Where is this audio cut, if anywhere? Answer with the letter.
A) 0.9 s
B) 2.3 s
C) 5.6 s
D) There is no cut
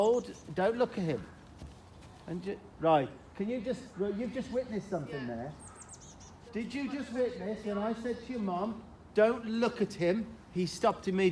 D